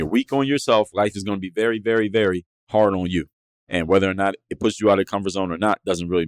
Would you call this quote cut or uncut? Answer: cut